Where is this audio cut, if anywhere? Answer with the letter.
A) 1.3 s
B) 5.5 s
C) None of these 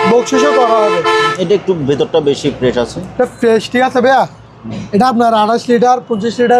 A